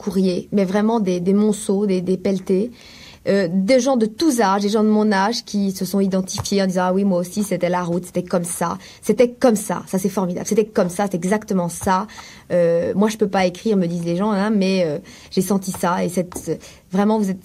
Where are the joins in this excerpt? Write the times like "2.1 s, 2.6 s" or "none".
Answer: none